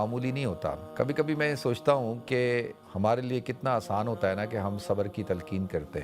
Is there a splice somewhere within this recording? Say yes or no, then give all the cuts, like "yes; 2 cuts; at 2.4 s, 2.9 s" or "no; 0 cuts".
yes; 2 cuts; at 0.9 s, 2.8 s